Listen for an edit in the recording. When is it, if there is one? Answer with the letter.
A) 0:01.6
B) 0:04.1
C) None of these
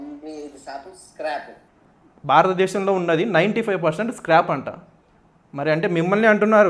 A